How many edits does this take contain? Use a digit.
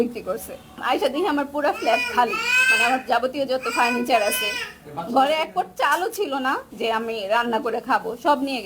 2